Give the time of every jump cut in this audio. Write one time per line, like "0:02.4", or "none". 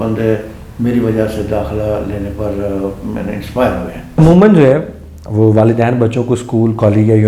0:04.2